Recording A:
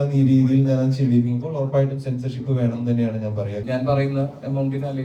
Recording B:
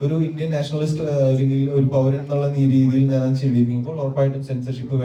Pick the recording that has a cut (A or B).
A